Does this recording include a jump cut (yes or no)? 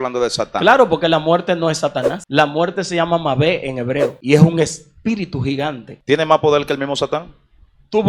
yes